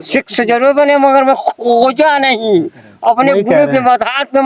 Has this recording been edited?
no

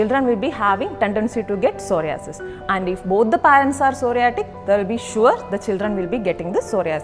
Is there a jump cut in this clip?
no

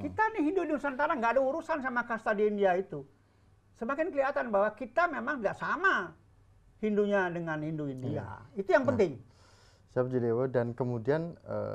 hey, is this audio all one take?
yes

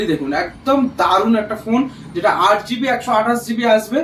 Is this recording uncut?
yes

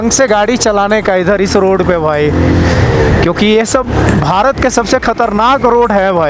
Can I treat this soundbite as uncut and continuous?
yes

